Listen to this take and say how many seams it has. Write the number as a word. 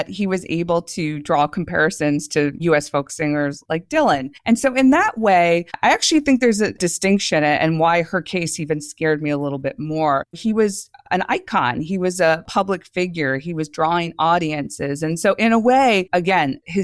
one